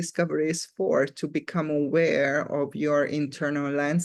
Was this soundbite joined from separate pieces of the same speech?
no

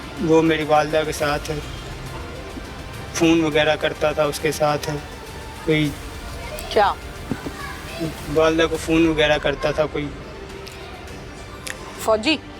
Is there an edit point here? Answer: no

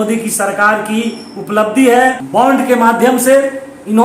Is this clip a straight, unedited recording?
no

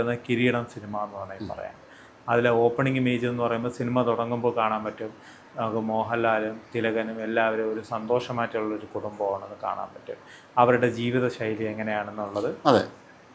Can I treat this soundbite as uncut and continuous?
yes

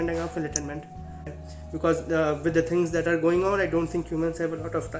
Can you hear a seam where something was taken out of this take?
yes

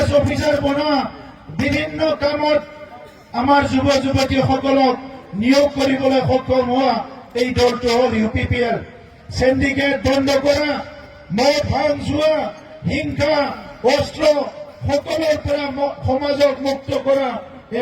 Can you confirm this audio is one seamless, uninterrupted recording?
yes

